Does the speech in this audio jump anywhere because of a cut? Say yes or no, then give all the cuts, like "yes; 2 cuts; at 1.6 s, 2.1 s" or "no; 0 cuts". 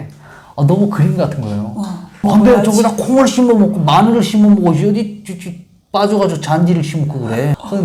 no; 0 cuts